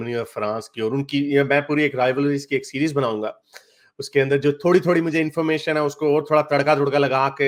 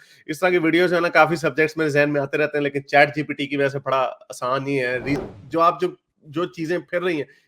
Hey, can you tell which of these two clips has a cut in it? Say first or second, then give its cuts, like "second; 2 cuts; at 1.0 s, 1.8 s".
second; 1 cut; at 5.2 s